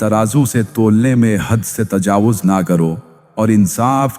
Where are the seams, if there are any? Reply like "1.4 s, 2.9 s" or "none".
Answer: 3.2 s